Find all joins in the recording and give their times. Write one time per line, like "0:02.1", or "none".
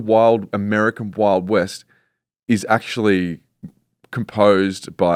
none

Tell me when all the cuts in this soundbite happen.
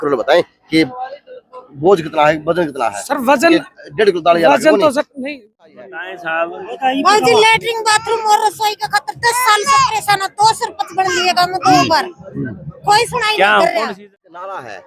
0:05.3
0:13.9

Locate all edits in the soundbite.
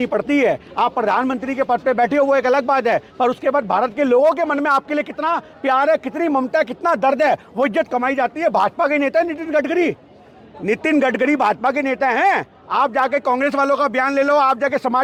none

